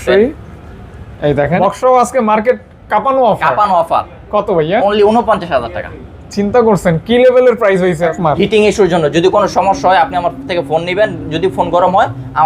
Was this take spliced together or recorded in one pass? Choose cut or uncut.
cut